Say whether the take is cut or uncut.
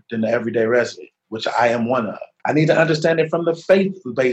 cut